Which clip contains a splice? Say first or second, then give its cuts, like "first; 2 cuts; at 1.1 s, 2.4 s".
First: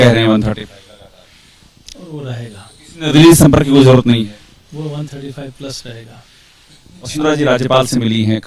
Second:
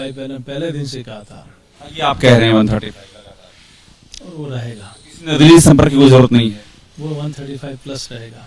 first; 1 cut; at 7.1 s